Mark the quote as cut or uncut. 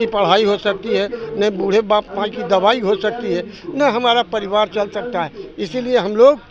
uncut